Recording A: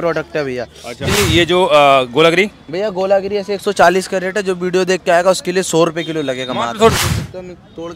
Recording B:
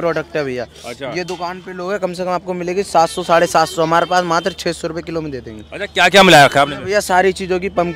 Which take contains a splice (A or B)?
A